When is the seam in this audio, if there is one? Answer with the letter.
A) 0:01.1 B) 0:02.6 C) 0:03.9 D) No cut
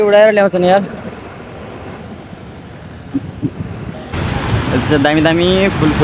C